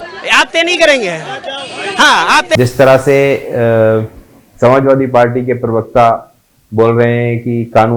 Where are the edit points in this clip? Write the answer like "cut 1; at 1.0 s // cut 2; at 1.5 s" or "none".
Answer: cut 1; at 2.6 s